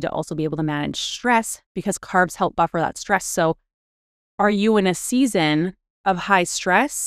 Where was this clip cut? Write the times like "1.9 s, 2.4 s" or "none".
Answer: none